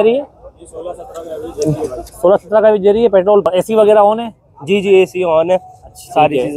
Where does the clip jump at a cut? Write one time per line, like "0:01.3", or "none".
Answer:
0:03.4